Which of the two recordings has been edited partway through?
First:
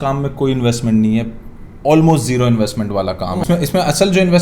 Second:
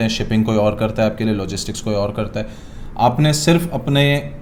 first; 1 cut; at 3.4 s

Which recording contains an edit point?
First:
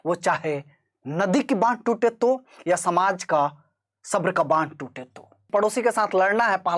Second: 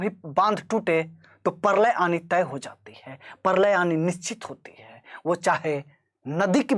first; 1 cut; at 5.4 s

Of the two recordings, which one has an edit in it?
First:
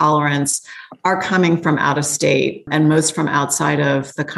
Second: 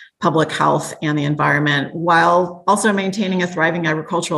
first; 1 cut; at 2.7 s

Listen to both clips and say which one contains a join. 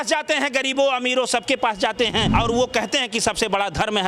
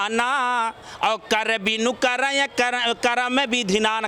first; 1 cut; at 2.3 s

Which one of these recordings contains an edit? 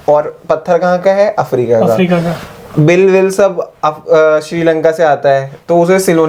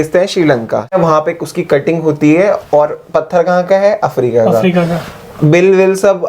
second; 1 cut; at 1.0 s

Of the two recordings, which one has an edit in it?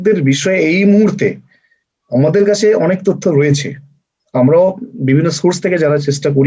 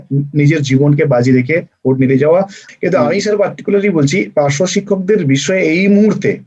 second; 1 cut; at 2.6 s

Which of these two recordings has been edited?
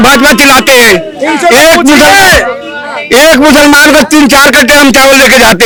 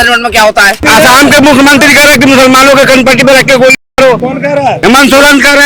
second; 2 cuts; at 0.8 s, 4.6 s

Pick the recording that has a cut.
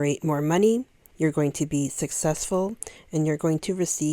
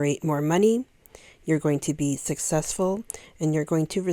first; 1 cut; at 1.0 s

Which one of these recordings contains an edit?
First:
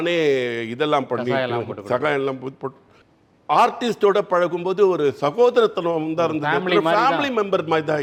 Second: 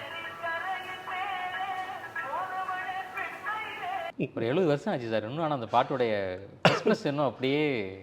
second; 1 cut; at 4.1 s

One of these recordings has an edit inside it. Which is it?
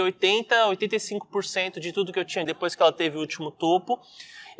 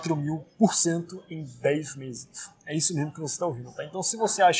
first; 1 cut; at 2.4 s

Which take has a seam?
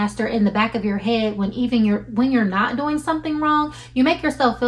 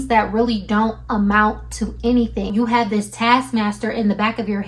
second; 1 cut; at 2.5 s

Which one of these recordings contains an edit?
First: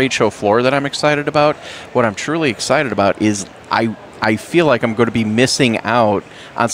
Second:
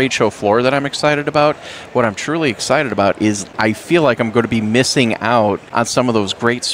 second; 2 cuts; at 3.5 s, 5.6 s

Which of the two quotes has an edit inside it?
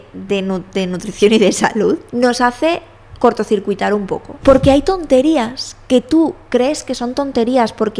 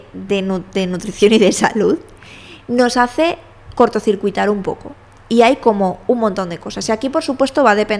first; 2 cuts; at 2.1 s, 4.3 s

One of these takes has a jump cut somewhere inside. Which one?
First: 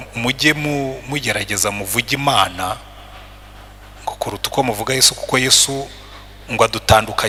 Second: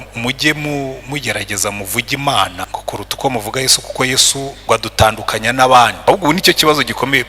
second; 3 cuts; at 2.6 s, 4.6 s, 6.1 s

